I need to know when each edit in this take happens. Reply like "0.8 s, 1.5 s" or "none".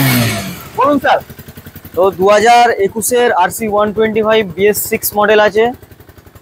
none